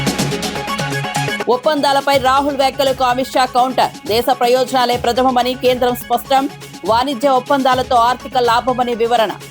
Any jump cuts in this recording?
yes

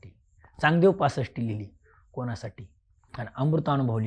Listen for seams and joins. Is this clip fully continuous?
yes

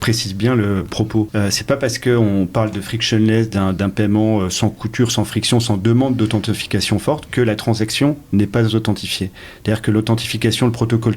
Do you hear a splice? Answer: yes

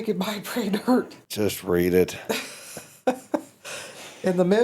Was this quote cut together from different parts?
yes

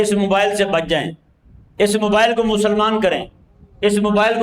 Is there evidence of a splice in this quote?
no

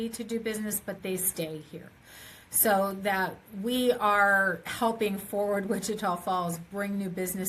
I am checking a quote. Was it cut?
no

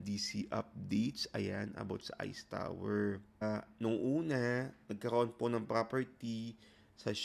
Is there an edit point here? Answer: yes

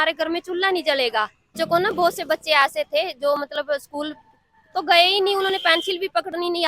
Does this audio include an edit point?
yes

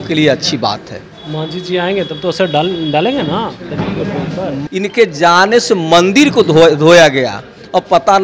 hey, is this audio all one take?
no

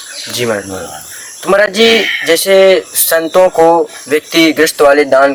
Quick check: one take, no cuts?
yes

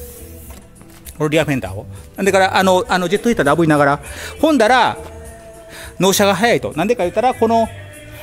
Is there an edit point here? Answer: yes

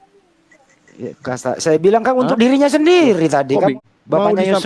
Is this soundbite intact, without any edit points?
no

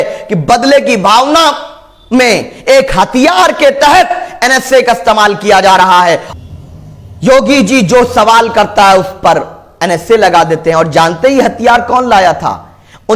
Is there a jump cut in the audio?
yes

